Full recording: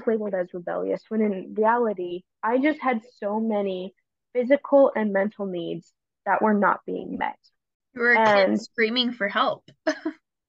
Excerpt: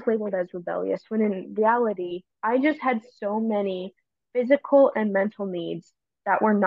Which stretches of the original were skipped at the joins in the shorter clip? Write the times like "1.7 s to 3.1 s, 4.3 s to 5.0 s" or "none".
none